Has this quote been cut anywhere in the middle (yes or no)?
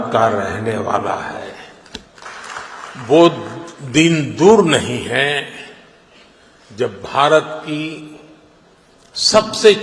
yes